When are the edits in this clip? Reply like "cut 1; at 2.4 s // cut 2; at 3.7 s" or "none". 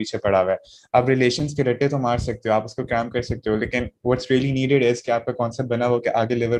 none